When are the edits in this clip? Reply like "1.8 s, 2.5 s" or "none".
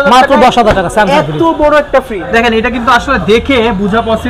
2.2 s